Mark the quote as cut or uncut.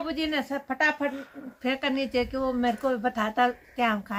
uncut